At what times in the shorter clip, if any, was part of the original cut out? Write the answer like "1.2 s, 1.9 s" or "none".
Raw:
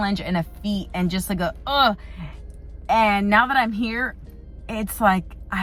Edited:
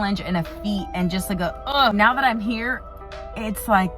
1.9 s